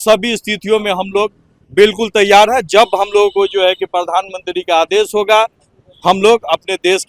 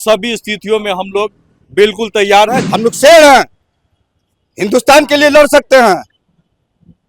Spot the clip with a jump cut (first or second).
second